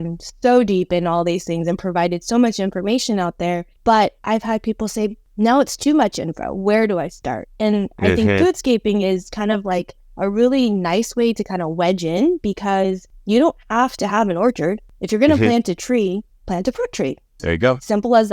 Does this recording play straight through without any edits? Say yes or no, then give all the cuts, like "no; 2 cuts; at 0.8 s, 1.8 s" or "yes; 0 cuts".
no; 4 cuts; at 3.7 s, 5.2 s, 13.1 s, 17.3 s